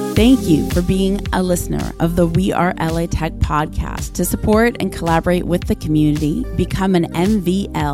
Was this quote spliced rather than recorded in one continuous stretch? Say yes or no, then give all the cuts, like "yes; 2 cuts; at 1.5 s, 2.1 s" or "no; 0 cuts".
no; 0 cuts